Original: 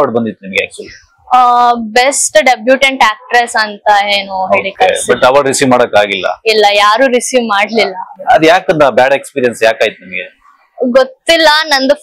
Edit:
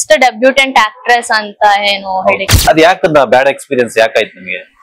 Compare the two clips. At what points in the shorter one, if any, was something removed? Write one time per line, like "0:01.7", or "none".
0:02.4

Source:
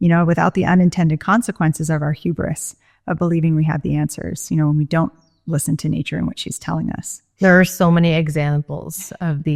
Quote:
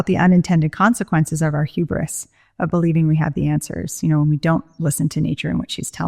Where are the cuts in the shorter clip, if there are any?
0:04.7

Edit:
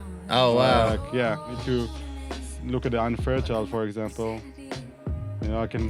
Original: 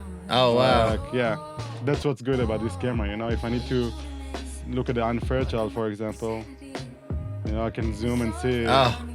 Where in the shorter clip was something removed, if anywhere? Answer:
0:01.6

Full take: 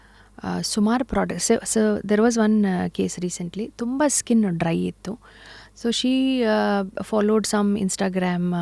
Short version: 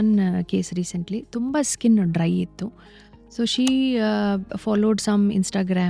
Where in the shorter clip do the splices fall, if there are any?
none

